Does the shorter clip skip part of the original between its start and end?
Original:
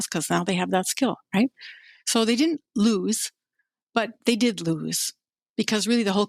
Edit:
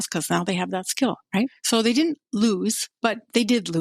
yes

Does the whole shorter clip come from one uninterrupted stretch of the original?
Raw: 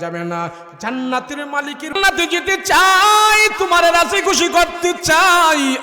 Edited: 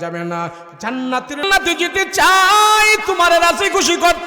no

